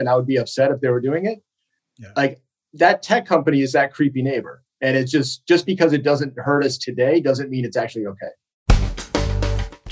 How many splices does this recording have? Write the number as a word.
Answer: one